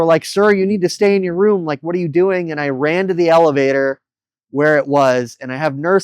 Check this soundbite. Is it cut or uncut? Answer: uncut